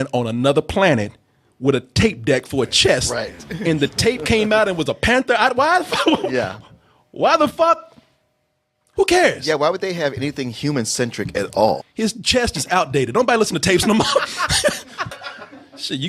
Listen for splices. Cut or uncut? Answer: cut